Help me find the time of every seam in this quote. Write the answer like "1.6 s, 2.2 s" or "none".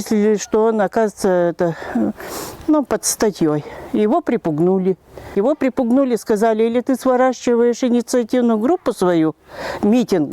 5.3 s